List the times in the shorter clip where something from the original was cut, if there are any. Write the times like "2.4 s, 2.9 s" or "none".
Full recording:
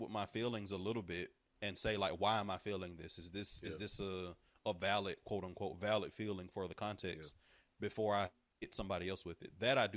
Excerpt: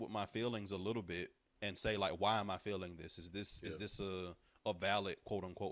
none